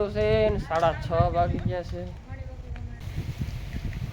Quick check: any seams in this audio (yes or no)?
yes